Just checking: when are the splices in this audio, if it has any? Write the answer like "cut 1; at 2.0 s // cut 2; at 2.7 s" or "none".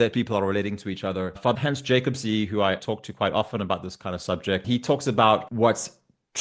cut 1; at 1.6 s // cut 2; at 2.8 s // cut 3; at 4.6 s // cut 4; at 5.5 s